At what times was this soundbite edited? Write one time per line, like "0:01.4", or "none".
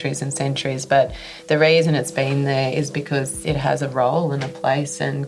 0:03.4